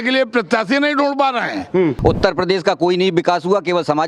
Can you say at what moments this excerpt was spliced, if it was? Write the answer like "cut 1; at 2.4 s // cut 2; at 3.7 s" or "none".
cut 1; at 2.0 s